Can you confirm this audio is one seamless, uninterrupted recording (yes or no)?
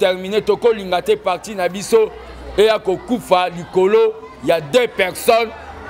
yes